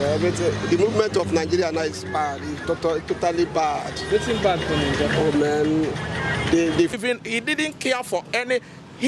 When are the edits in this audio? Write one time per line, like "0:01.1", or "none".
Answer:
0:06.9